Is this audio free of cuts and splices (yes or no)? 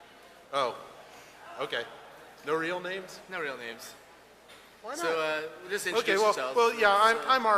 no